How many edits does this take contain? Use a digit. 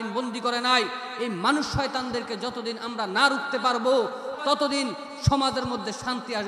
1